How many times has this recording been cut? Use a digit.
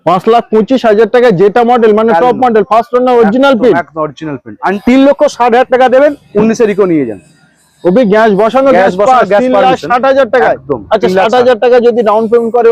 1